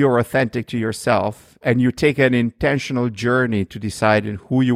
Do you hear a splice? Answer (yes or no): no